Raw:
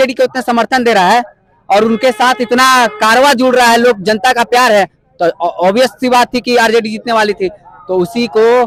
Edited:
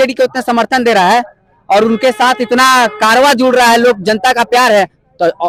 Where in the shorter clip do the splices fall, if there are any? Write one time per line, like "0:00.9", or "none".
none